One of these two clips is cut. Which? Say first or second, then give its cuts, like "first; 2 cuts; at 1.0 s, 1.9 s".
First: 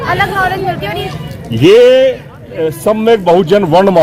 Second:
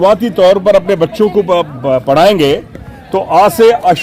first; 1 cut; at 1.1 s